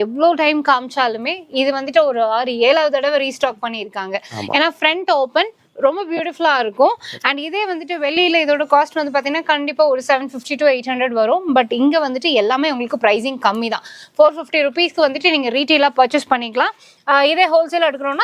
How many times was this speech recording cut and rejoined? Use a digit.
0